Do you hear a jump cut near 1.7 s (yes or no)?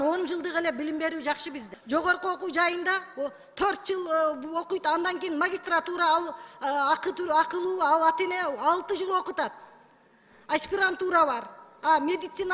yes